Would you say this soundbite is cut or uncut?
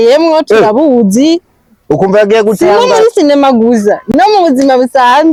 uncut